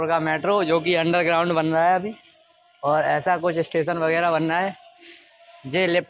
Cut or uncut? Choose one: uncut